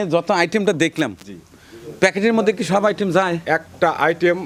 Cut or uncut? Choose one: uncut